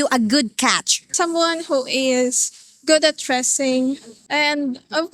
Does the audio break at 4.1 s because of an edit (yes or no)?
yes